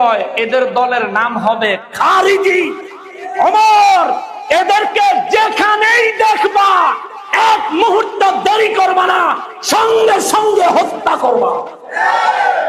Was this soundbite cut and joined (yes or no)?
no